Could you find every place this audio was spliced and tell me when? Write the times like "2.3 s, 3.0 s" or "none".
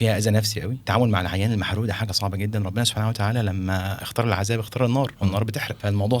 0.8 s, 4.0 s, 5.2 s